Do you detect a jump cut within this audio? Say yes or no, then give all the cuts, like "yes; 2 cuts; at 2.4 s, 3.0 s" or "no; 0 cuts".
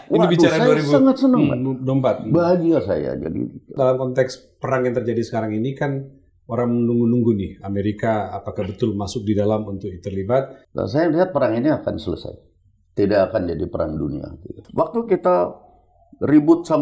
yes; 3 cuts; at 3.7 s, 10.6 s, 14.6 s